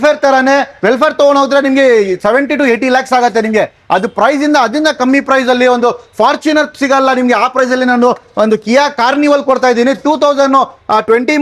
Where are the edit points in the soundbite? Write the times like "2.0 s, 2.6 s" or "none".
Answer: none